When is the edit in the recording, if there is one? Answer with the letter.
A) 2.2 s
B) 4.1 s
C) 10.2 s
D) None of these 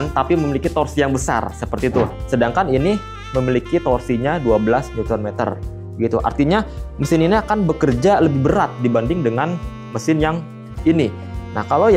A